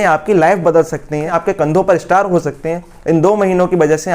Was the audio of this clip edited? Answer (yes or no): yes